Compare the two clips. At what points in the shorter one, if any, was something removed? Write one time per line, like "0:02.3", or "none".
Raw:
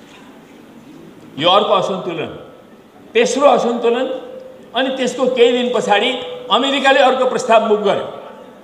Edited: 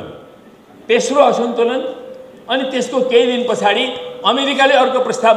none